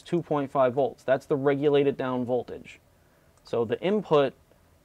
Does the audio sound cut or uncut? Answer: uncut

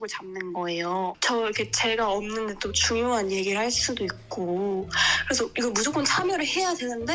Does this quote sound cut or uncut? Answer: cut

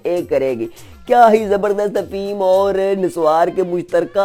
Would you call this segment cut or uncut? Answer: uncut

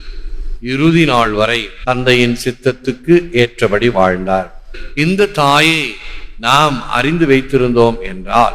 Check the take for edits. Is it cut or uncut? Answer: cut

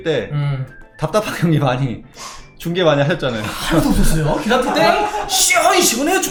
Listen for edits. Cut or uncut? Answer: uncut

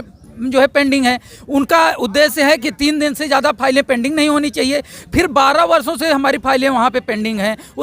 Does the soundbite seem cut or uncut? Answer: uncut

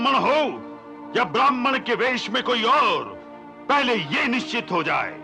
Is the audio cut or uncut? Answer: uncut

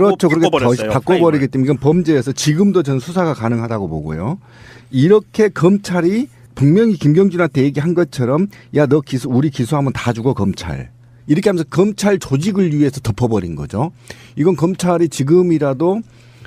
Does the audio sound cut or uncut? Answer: uncut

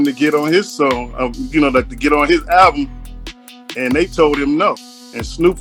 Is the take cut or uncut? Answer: uncut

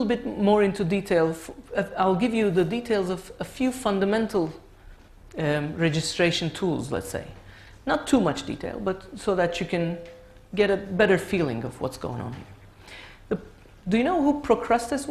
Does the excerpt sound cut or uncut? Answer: uncut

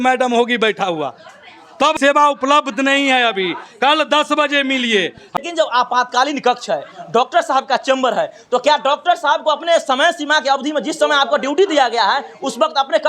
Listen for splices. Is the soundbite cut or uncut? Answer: cut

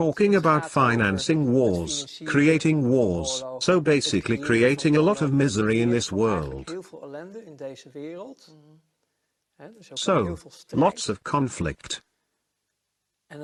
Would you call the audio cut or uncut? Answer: uncut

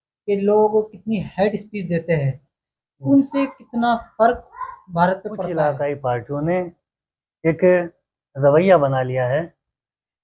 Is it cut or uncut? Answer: cut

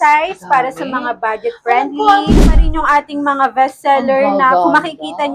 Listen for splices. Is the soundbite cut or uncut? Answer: cut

